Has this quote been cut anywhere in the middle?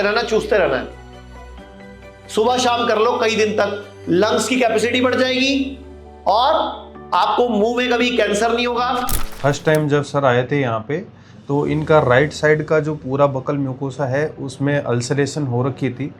yes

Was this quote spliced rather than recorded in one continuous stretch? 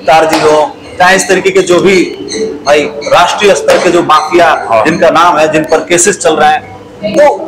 no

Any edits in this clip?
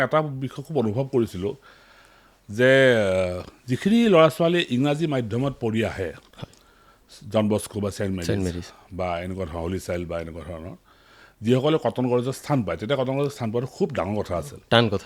no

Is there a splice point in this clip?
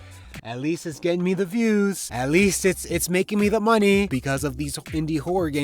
yes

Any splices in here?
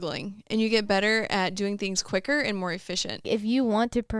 yes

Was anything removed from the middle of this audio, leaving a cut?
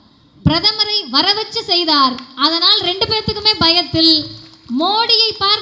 no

